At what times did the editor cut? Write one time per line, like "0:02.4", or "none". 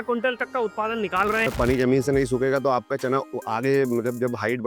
0:01.5
0:03.4